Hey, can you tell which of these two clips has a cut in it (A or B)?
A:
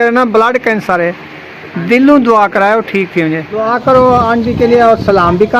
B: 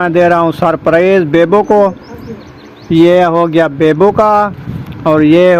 A